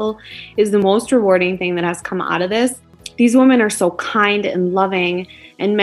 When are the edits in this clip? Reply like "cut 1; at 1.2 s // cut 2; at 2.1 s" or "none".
cut 1; at 0.8 s // cut 2; at 3.0 s

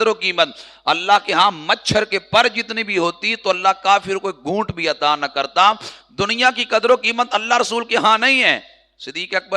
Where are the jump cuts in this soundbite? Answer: none

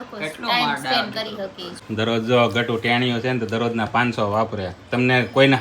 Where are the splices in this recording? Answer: cut 1; at 1.7 s

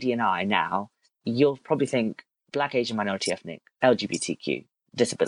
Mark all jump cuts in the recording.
cut 1; at 1.2 s

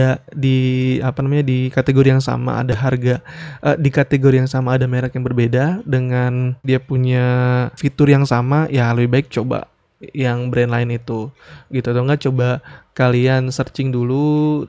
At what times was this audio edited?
cut 1; at 6.7 s // cut 2; at 7.8 s

